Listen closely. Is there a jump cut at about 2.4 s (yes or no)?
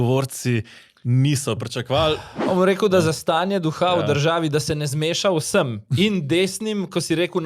yes